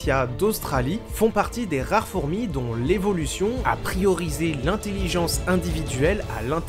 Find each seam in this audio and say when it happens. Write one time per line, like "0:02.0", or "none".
none